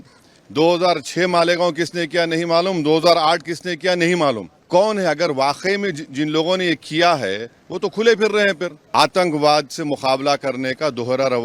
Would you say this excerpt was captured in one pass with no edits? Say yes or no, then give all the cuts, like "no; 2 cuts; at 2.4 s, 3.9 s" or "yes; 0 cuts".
no; 2 cuts; at 4.5 s, 8.8 s